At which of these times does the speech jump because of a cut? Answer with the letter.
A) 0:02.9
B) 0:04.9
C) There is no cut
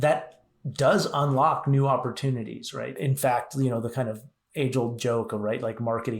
A